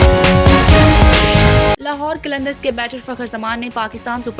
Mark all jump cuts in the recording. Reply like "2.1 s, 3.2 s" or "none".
1.8 s